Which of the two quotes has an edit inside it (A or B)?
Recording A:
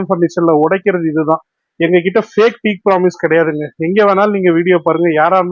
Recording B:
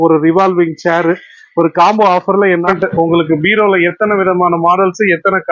B